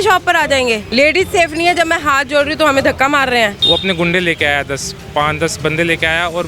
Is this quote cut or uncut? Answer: cut